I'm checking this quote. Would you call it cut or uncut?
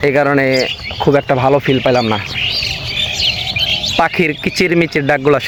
uncut